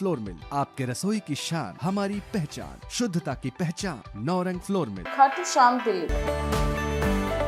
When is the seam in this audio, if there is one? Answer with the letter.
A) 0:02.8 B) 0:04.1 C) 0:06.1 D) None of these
C